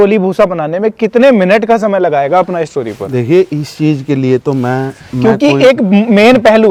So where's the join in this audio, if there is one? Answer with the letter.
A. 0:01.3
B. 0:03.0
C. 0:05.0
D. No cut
D